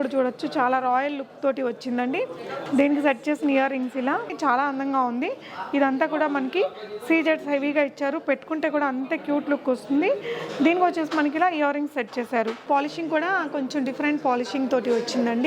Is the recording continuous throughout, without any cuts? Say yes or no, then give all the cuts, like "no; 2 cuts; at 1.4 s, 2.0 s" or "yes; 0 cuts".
no; 2 cuts; at 4.3 s, 12.6 s